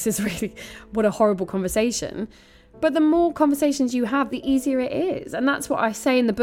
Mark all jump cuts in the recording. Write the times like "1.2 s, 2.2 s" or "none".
4.3 s